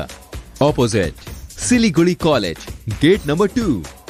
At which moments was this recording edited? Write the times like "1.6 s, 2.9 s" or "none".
none